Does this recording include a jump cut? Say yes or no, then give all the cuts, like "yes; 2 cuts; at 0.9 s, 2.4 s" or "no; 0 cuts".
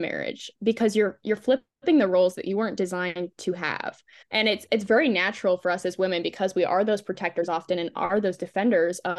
no; 0 cuts